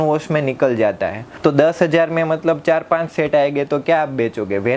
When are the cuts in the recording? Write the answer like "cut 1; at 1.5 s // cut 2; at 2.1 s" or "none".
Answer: cut 1; at 1.2 s